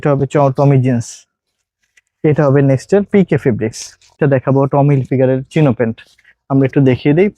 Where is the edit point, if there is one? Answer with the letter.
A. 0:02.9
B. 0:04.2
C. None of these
B